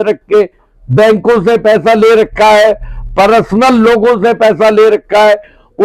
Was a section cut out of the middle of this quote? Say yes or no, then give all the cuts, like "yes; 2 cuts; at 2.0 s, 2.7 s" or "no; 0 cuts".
no; 0 cuts